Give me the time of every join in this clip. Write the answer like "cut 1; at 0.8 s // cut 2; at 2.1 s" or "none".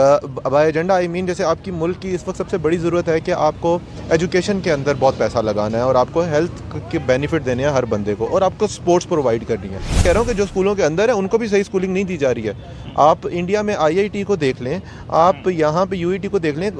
cut 1; at 10.0 s